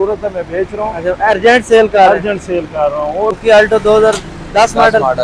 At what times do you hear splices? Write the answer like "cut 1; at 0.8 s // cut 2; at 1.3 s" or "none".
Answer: cut 1; at 3.4 s